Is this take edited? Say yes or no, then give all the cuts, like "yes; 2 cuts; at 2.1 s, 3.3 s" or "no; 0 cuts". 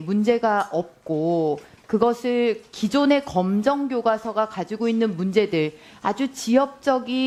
no; 0 cuts